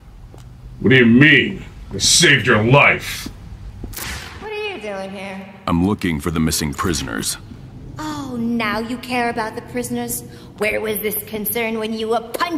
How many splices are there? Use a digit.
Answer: 1